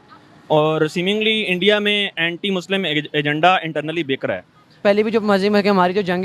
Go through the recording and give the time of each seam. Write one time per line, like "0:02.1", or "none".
0:04.8